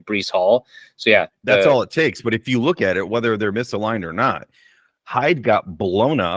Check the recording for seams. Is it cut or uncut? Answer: uncut